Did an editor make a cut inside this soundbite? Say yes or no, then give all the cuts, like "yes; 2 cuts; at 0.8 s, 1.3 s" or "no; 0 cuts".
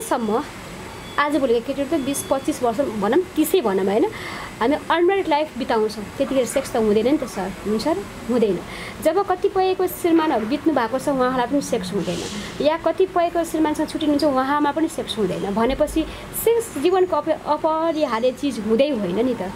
no; 0 cuts